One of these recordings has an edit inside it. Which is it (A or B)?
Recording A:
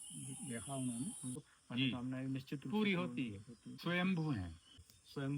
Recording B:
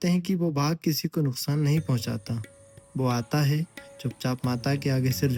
A